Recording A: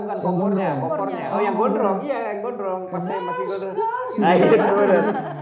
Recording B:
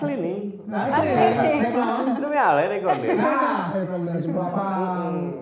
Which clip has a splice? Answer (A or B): B